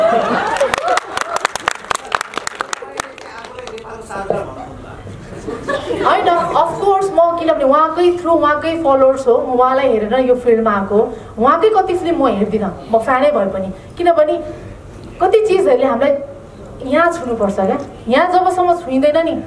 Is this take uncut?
yes; 0 cuts

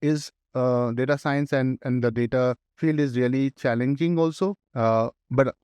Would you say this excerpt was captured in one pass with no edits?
no; 2 cuts; at 2.7 s, 4.6 s

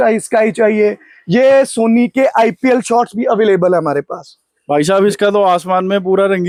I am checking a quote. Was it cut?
no; 0 cuts

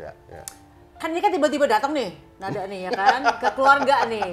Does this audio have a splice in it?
no; 0 cuts

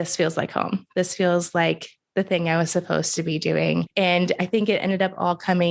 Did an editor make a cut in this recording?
yes; 1 cut; at 3.9 s

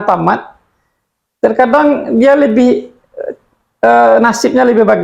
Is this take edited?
no; 0 cuts

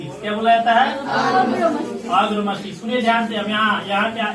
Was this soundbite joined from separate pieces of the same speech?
no; 0 cuts

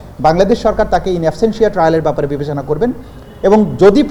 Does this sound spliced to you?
no; 0 cuts

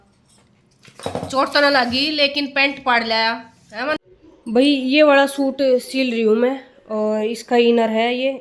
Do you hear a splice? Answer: yes; 1 cut; at 4.0 s

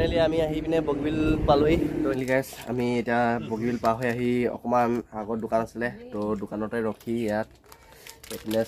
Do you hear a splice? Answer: yes; 1 cut; at 2.1 s

